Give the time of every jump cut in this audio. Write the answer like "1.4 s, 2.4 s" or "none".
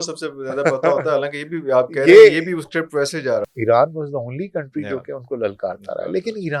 3.5 s